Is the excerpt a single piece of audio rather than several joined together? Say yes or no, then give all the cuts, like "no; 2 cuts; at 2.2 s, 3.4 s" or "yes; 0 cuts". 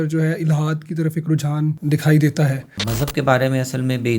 no; 2 cuts; at 1.8 s, 2.8 s